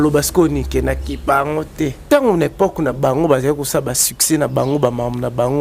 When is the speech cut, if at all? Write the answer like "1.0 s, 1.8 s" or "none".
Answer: 2.0 s